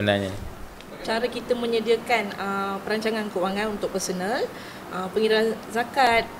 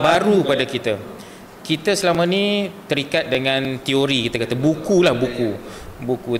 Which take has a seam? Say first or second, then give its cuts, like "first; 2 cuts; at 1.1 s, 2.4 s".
first; 1 cut; at 0.9 s